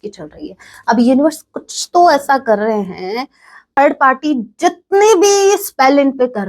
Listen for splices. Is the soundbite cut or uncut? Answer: cut